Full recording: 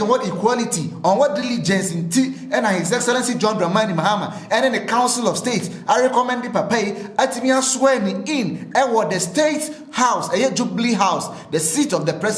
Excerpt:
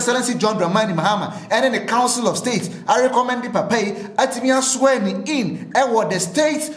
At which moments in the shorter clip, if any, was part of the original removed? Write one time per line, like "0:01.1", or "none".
none